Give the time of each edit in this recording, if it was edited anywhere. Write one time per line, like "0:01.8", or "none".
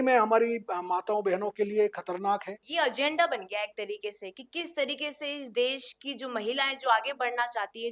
0:02.6